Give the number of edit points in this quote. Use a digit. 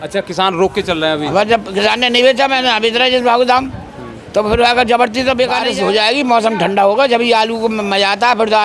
1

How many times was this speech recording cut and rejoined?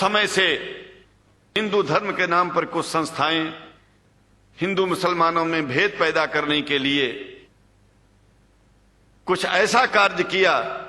1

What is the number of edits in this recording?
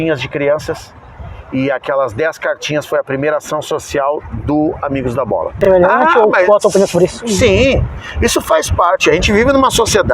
1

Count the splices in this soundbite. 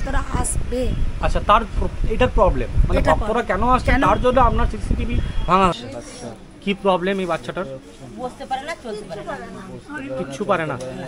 1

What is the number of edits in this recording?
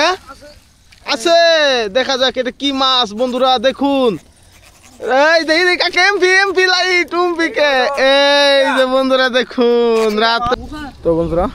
1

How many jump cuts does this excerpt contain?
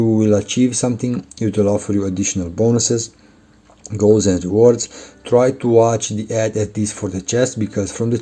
0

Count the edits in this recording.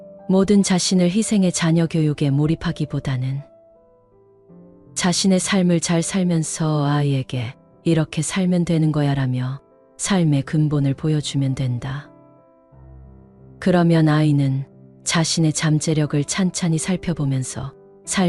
0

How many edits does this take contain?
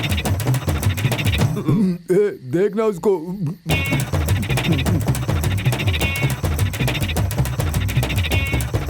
1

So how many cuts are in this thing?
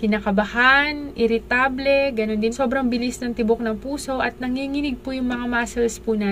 1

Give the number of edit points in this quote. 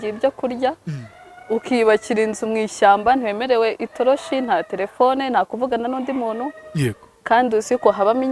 0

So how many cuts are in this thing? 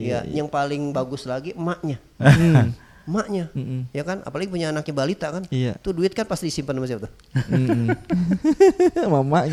0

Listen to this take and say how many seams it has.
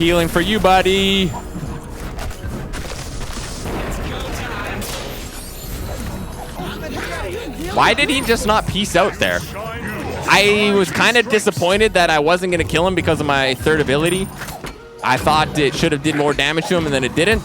0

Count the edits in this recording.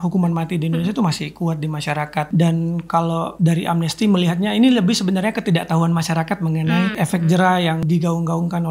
4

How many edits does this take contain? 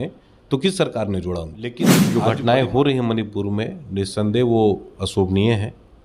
1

